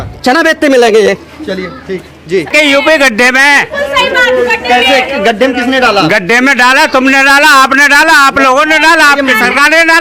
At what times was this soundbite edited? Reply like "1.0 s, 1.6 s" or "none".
none